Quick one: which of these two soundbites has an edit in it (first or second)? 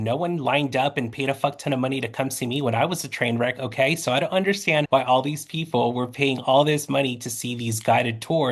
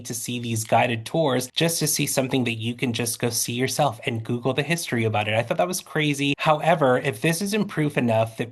second